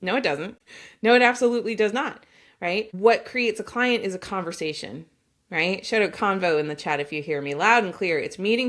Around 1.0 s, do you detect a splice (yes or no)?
no